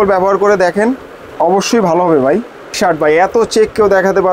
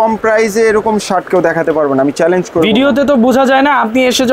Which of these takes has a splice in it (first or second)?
first